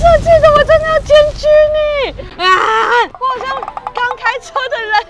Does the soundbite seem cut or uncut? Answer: cut